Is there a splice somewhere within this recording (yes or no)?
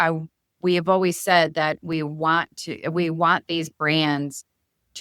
no